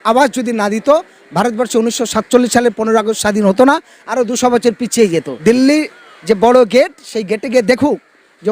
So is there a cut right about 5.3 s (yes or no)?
yes